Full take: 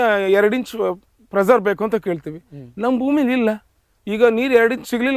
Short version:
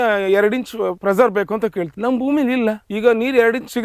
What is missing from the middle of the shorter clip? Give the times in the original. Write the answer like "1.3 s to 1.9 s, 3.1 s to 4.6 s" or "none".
1.0 s to 1.3 s, 2.2 s to 2.7 s, 3.7 s to 4.0 s